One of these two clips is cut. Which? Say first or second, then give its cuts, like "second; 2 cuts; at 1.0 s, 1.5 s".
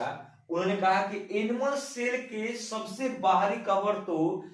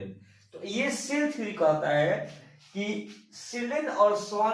first; 1 cut; at 1.2 s